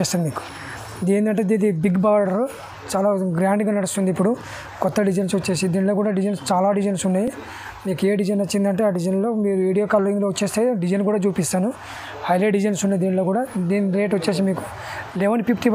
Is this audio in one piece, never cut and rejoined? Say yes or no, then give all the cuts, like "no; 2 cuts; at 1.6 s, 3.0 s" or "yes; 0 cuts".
yes; 0 cuts